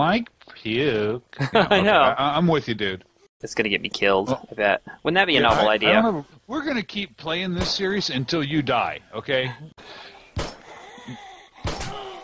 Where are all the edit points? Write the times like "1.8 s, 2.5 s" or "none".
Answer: 3.4 s, 6.4 s, 9.8 s

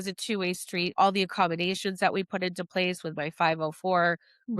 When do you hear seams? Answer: 0.9 s

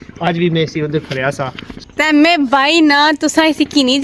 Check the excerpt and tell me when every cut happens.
1.7 s

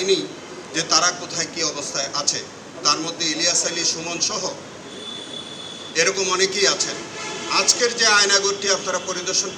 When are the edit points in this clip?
none

